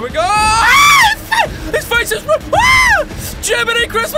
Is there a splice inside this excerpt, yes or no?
no